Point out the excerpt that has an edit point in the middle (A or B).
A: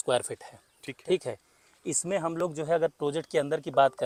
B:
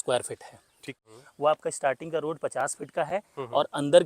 B